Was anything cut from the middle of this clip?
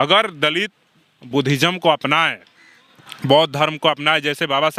no; 0 cuts

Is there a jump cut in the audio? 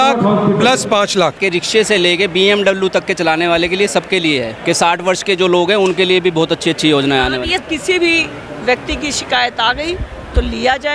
yes; 3 cuts; at 1.4 s, 4.5 s, 7.6 s

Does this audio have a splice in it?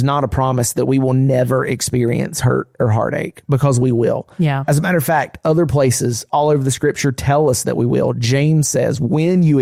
no; 0 cuts

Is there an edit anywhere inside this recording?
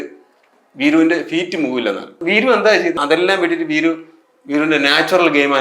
yes; 2 cuts; at 2.1 s, 3.0 s

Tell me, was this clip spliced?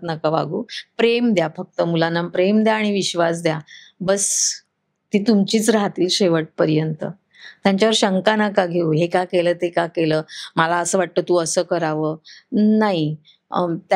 no; 0 cuts

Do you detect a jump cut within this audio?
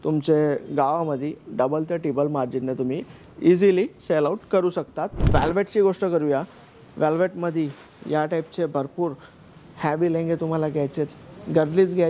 yes; 1 cut; at 5.2 s

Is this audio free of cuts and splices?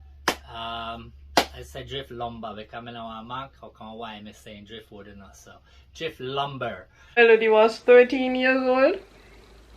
no; 1 cut; at 7.2 s

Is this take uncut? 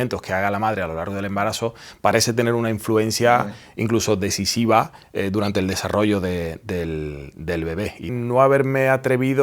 no; 1 cut; at 8.2 s

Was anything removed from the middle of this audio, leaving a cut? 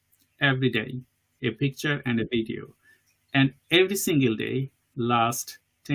no; 0 cuts

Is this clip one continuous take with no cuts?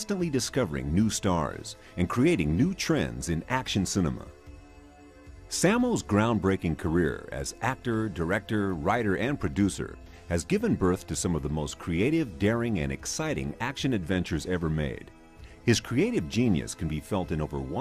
yes; 0 cuts

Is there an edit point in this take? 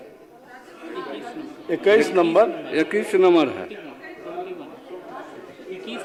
no; 0 cuts

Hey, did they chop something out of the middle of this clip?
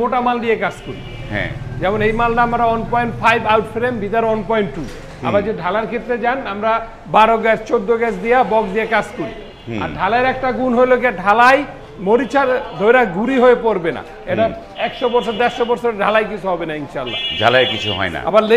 no; 0 cuts

